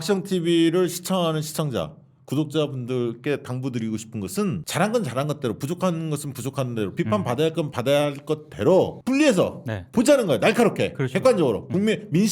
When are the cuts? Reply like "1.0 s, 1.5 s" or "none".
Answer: 4.7 s, 7.7 s, 9.0 s